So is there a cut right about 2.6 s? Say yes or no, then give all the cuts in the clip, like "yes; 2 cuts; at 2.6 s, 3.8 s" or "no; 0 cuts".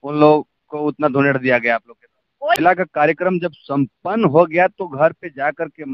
yes; 1 cut; at 2.6 s